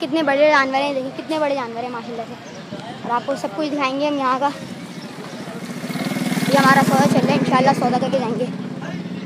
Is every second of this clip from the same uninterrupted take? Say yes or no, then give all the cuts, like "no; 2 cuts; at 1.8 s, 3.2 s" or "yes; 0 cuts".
yes; 0 cuts